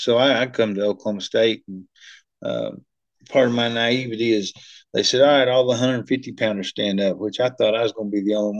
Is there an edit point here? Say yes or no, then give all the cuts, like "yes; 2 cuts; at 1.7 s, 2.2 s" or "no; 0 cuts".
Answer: no; 0 cuts